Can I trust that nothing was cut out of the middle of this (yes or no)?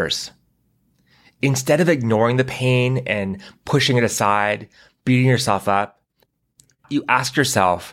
no